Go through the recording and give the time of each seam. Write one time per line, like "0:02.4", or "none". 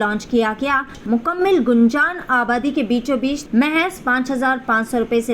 0:01.0
0:03.4